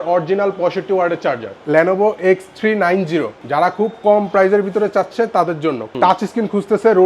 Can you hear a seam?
yes; 2 cuts; at 1.5 s, 5.9 s

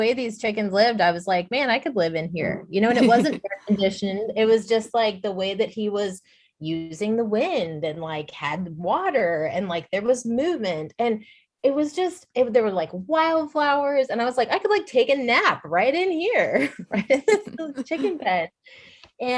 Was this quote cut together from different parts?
no; 0 cuts

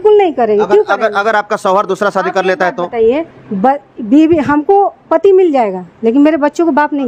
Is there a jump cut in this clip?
no; 0 cuts

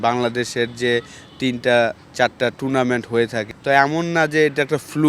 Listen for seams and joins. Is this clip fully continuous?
no; 1 cut; at 3.4 s

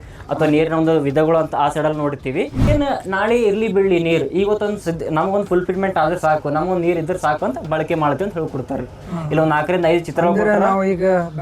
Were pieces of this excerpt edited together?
yes; 1 cut; at 2.6 s

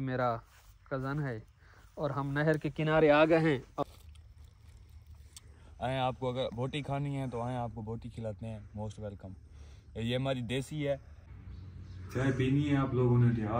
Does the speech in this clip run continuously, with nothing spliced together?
no; 2 cuts; at 3.8 s, 11.3 s

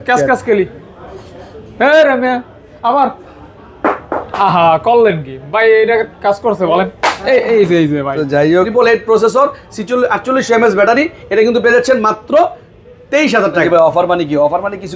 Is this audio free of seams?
no; 2 cuts; at 8.7 s, 13.6 s

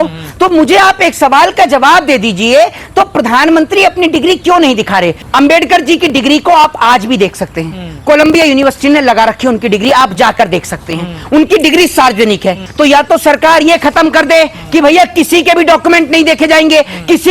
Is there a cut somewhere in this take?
yes; 2 cuts; at 5.2 s, 12.6 s

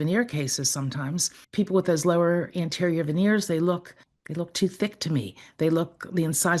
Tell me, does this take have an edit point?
yes; 1 cut; at 1.4 s

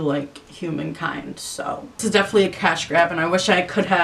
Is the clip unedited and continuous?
no; 1 cut; at 1.9 s

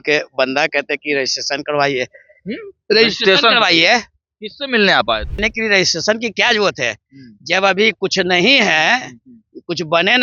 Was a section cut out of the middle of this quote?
yes; 1 cut; at 5.4 s

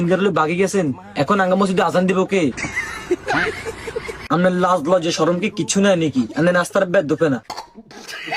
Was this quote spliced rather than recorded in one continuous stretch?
no; 0 cuts

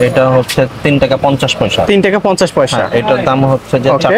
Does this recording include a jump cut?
no; 0 cuts

